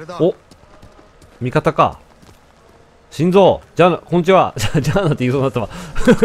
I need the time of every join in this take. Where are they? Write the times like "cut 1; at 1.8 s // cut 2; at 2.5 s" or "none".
none